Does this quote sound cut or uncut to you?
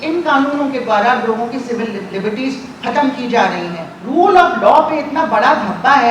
cut